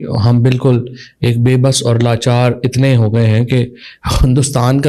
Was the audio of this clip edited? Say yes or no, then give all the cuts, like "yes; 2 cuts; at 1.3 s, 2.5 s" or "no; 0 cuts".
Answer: no; 0 cuts